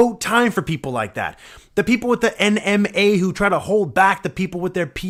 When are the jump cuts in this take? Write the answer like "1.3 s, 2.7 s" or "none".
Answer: none